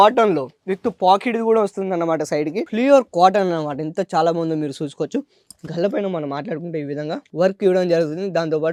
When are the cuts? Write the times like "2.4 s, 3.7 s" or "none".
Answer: none